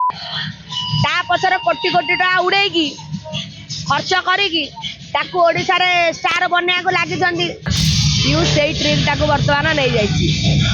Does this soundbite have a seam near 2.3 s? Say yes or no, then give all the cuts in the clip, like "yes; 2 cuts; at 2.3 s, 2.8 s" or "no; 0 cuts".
no; 1 cut; at 7.7 s